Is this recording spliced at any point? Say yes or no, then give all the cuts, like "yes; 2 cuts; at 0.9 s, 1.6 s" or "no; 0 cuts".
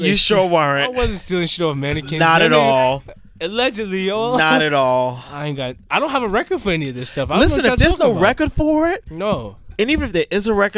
no; 0 cuts